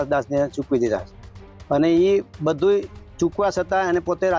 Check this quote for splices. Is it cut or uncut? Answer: uncut